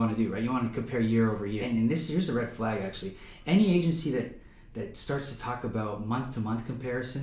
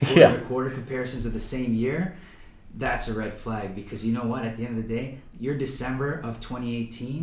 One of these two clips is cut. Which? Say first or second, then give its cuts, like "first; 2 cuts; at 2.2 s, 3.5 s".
first; 1 cut; at 1.6 s